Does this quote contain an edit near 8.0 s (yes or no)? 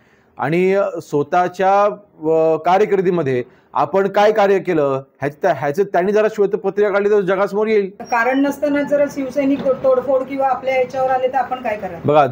yes